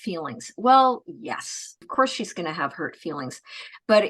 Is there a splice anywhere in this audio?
yes; 1 cut; at 1.8 s

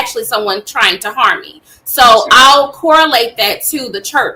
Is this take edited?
no; 0 cuts

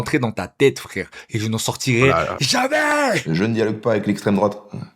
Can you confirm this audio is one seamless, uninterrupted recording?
no; 1 cut; at 3.2 s

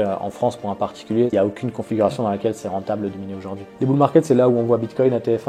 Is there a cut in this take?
yes; 2 cuts; at 1.3 s, 3.7 s

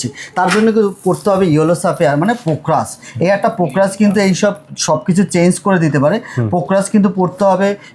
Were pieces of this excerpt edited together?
no; 0 cuts

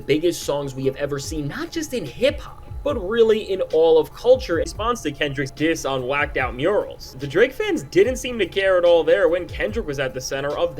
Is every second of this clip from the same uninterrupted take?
no; 1 cut; at 4.7 s

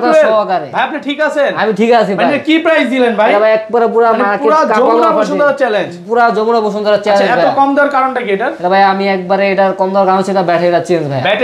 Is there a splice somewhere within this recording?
no; 0 cuts

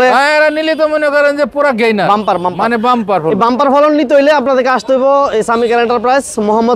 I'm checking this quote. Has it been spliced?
no; 0 cuts

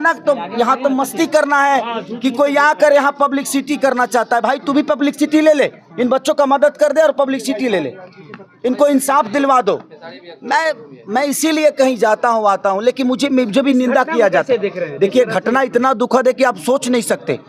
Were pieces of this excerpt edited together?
no; 0 cuts

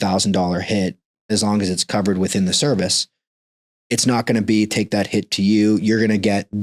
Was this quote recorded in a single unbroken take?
no; 1 cut; at 1.3 s

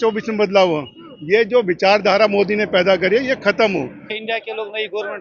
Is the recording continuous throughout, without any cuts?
no; 1 cut; at 4.1 s

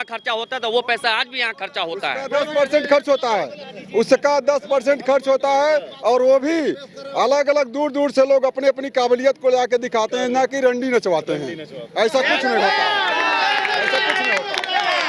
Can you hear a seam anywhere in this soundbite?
no; 0 cuts

